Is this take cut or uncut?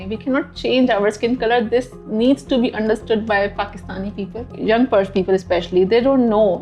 cut